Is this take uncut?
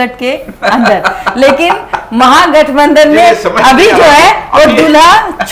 yes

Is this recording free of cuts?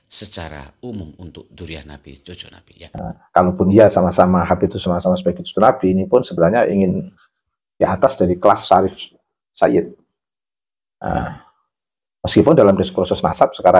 no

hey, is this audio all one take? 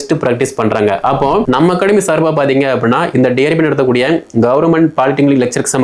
no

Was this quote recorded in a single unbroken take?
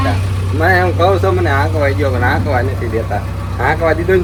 yes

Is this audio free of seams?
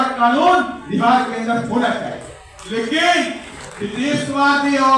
yes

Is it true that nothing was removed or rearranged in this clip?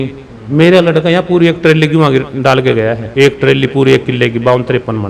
yes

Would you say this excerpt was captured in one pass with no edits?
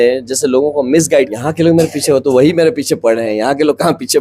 no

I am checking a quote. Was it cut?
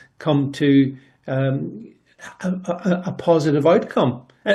no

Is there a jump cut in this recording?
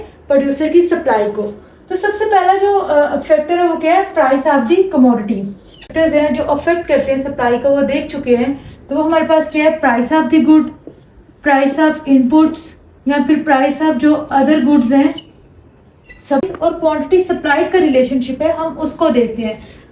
yes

